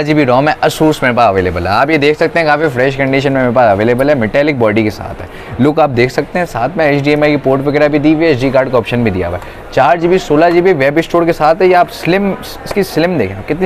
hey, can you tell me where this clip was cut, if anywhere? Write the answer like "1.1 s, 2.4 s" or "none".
none